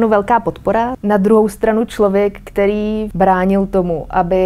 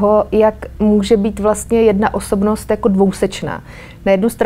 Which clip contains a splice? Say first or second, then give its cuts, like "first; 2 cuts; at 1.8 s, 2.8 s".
first; 2 cuts; at 1.0 s, 3.1 s